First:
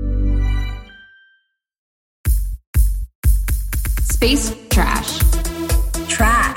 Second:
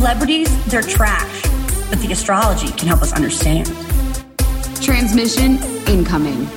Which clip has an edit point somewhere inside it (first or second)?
first